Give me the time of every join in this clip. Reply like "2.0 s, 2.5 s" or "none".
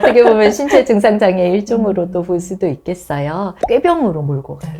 3.5 s